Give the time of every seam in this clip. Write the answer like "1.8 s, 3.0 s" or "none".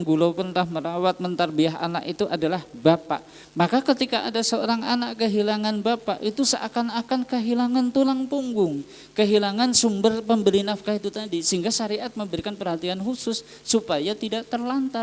none